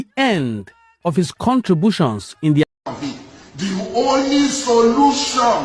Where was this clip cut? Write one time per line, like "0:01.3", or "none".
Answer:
0:02.6

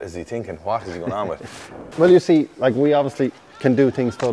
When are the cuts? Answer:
0:01.9

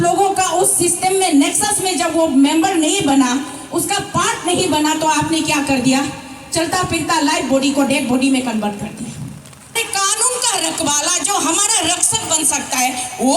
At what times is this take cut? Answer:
0:09.7

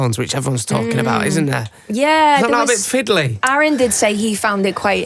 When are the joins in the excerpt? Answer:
0:03.4

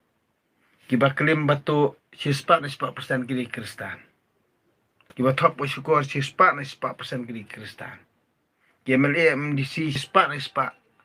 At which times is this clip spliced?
none

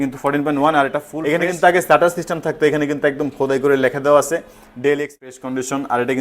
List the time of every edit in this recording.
0:01.1
0:05.2

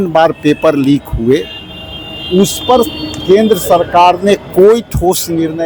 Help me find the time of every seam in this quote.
none

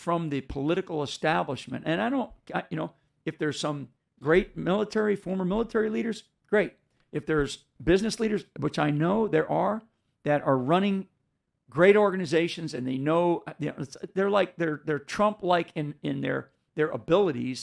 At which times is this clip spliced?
0:02.3

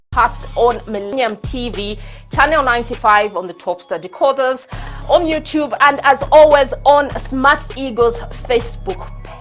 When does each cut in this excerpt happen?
0:01.1

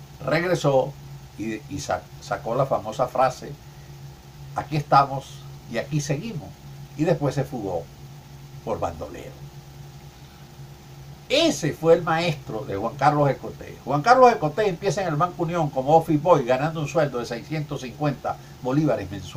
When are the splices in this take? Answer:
none

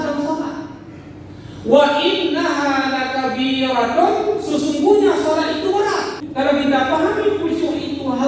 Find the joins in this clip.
0:06.2

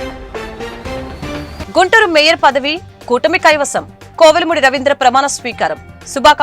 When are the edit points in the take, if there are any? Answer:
0:01.6

